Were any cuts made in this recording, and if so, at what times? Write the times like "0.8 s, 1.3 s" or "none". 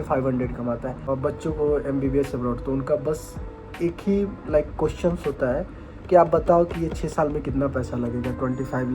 1.1 s